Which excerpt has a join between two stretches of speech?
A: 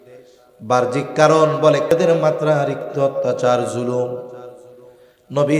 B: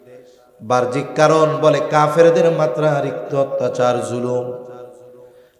A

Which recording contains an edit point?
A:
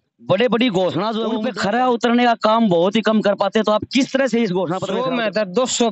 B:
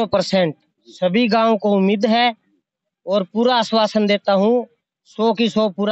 A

